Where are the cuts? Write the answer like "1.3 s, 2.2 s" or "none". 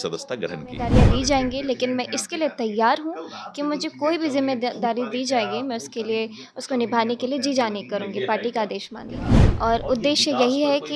0.9 s, 9.4 s